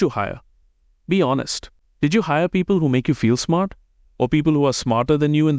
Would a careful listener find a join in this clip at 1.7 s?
no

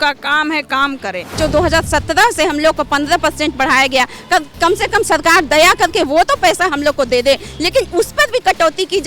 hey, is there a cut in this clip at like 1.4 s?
yes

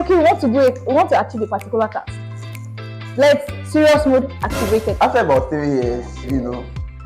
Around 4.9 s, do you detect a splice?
yes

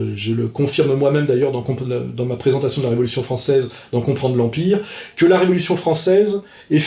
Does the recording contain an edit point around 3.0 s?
yes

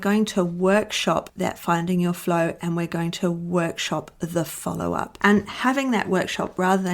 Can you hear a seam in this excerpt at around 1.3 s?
yes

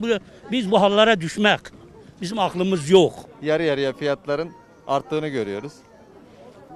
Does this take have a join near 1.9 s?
no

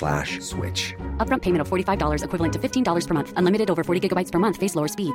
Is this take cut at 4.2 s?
no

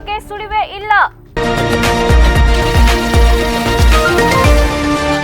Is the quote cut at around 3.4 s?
no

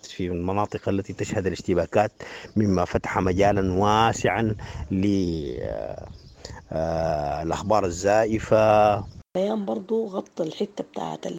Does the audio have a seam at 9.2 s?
yes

